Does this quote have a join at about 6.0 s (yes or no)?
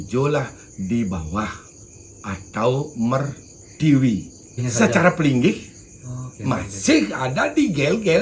no